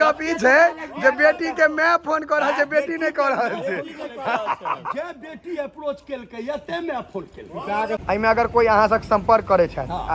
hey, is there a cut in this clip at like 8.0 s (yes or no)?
yes